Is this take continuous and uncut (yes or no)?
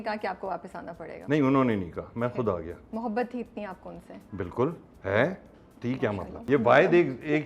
no